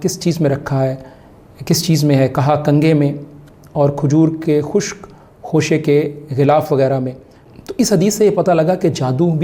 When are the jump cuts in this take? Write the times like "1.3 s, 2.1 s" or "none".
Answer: 7.4 s